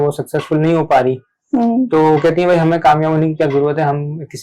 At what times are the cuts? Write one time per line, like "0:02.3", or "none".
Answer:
none